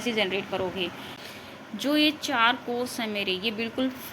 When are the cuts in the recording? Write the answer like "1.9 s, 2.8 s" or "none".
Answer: 1.1 s